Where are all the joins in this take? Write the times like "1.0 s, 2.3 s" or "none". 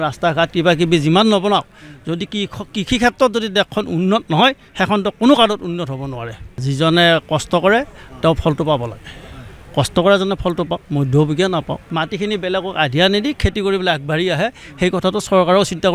6.6 s, 11.8 s